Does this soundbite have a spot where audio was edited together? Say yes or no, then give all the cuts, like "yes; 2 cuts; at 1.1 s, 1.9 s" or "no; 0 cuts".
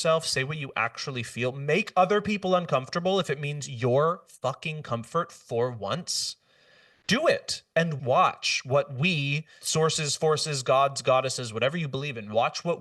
no; 0 cuts